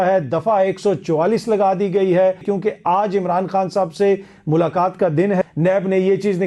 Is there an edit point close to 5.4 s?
yes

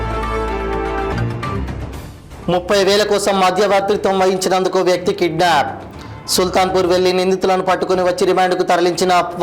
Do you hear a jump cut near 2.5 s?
no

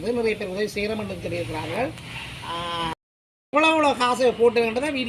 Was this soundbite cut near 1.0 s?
no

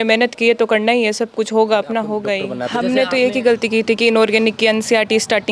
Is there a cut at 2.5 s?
yes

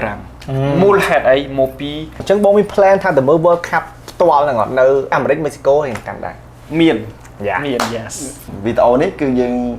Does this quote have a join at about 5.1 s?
yes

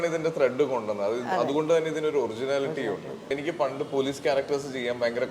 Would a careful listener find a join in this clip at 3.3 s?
yes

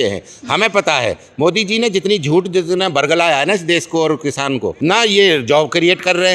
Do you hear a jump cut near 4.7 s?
yes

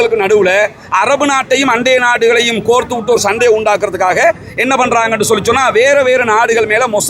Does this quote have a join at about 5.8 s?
no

